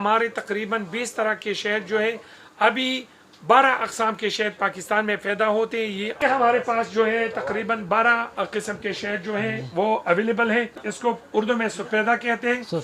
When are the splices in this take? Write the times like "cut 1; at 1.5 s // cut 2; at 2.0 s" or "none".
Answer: cut 1; at 6.2 s // cut 2; at 10.8 s